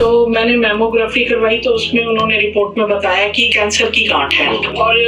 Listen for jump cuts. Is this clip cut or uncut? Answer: cut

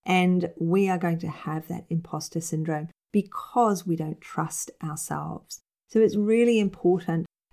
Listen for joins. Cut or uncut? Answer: uncut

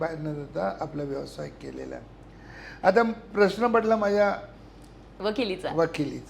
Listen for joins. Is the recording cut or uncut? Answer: uncut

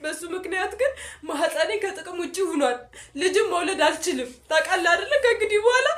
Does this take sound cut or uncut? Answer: uncut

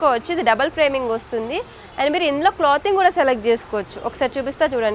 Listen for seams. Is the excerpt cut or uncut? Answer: uncut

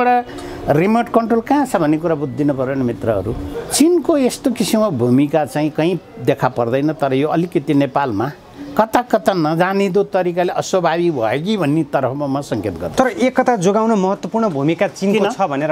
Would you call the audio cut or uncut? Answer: cut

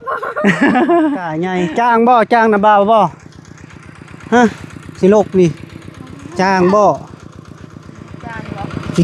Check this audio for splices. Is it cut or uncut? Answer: cut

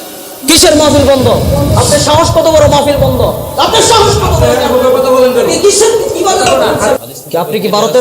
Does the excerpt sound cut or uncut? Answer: cut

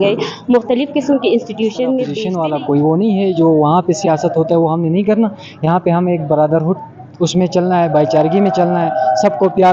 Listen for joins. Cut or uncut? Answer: cut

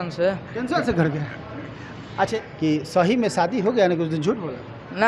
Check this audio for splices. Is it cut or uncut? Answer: cut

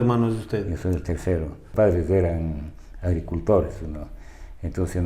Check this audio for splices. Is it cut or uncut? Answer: cut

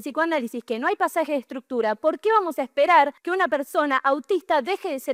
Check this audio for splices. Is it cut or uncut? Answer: uncut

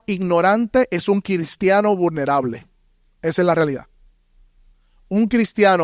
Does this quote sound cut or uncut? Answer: uncut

